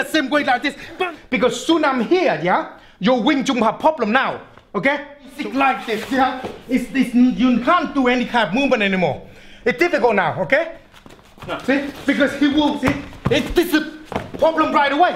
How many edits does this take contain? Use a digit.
3